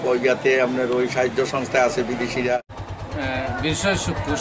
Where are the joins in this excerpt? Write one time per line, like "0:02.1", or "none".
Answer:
0:02.7